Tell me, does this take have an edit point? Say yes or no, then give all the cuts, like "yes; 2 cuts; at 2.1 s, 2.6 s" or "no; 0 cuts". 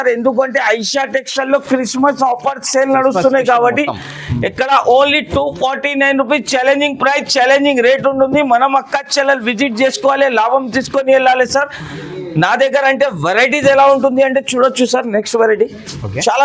no; 0 cuts